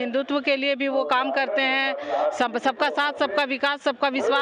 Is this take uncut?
yes; 0 cuts

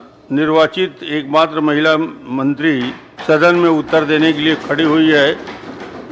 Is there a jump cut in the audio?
no; 0 cuts

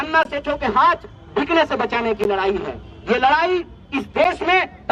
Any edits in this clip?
no; 0 cuts

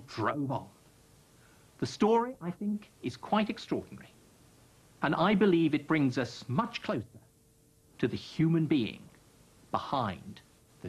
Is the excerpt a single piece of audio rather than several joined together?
no; 1 cut; at 6.0 s

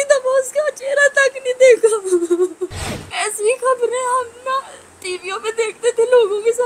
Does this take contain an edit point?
yes; 1 cut; at 2.7 s

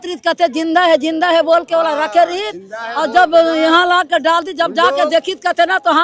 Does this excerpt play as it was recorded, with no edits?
yes; 0 cuts

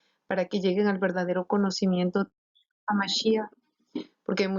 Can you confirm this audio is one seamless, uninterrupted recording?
yes; 0 cuts

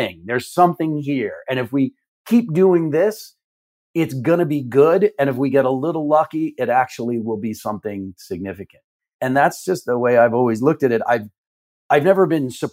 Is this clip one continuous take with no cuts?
yes; 0 cuts

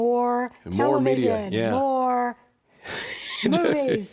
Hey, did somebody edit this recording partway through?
yes; 1 cut; at 1.7 s

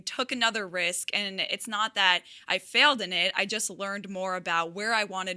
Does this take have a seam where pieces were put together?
no; 0 cuts

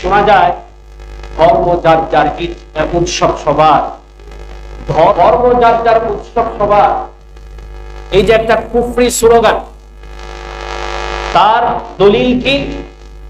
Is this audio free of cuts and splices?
no; 1 cut; at 5.1 s

